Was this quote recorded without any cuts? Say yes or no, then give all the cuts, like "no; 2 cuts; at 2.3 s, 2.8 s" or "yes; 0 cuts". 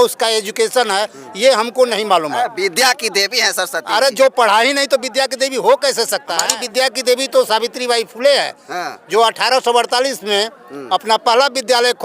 no; 1 cut; at 6.5 s